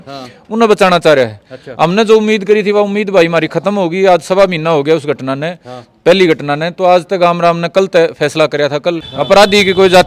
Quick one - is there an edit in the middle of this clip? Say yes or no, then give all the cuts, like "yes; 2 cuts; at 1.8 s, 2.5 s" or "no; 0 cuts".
yes; 1 cut; at 9.1 s